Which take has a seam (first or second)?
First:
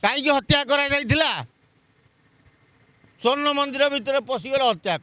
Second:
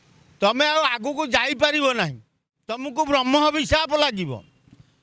second